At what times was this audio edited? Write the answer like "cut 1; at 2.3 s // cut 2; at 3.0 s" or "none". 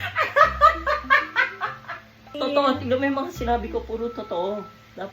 cut 1; at 2.3 s